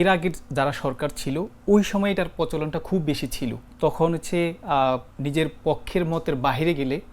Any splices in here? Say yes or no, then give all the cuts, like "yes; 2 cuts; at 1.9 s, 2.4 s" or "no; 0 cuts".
yes; 2 cuts; at 3.6 s, 5.1 s